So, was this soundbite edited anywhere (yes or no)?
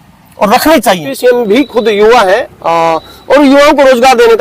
yes